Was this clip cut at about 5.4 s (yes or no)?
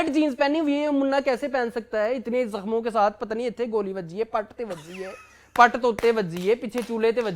no